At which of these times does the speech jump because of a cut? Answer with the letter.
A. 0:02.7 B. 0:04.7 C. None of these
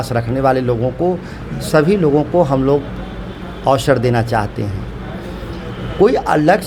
C